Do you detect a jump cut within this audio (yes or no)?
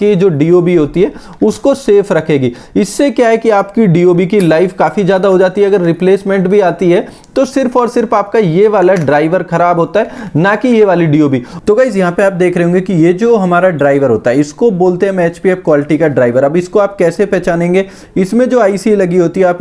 yes